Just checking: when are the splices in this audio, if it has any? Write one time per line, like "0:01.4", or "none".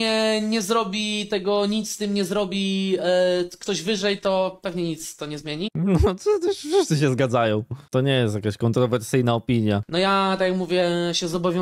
none